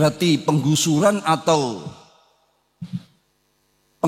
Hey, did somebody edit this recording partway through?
no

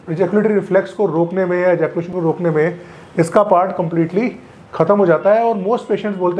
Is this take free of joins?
yes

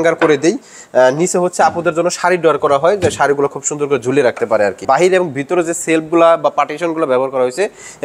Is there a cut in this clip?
yes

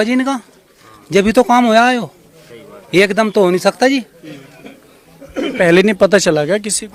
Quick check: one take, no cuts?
yes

